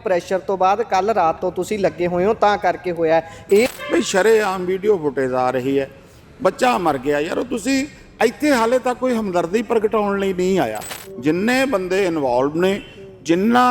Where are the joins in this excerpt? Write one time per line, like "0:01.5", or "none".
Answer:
0:03.7
0:11.0